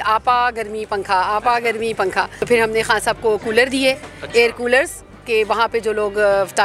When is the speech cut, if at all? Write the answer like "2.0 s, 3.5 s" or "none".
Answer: 2.4 s